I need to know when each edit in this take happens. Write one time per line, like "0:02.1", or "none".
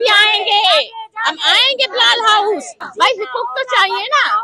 0:02.8